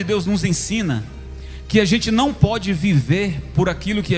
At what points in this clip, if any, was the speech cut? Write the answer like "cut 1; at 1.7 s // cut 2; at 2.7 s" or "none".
none